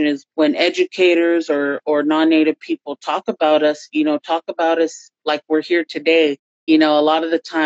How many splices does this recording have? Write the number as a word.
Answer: one